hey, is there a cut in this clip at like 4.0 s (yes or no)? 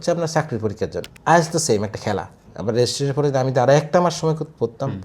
no